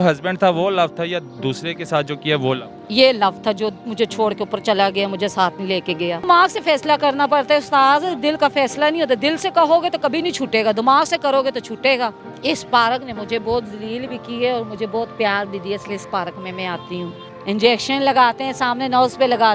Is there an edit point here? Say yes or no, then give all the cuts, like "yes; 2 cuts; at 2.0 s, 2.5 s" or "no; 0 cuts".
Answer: yes; 3 cuts; at 6.2 s, 12.3 s, 17.3 s